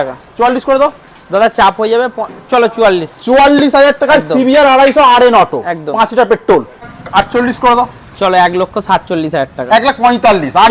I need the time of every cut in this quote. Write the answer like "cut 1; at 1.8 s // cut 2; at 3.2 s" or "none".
cut 1; at 6.9 s

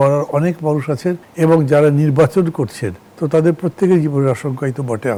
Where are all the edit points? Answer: none

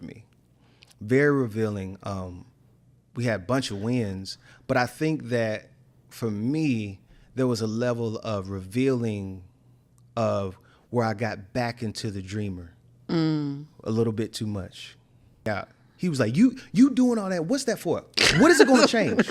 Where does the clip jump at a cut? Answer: cut 1; at 15.5 s

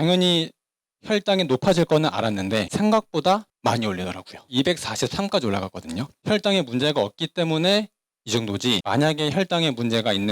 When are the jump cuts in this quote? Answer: cut 1; at 3.5 s

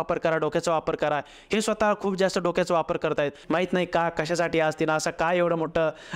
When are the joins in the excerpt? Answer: cut 1; at 3.4 s

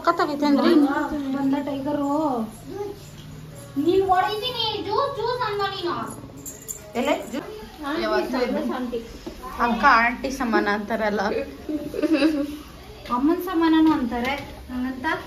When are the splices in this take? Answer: cut 1; at 7.5 s

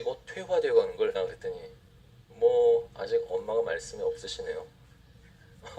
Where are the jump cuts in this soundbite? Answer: none

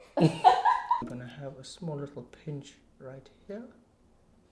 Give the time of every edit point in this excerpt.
cut 1; at 1.0 s

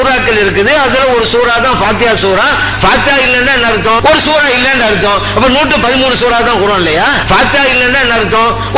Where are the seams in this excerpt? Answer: cut 1; at 2.7 s // cut 2; at 4.0 s // cut 3; at 7.2 s

